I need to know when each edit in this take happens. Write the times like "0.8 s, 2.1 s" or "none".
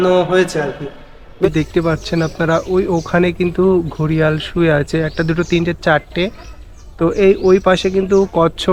1.5 s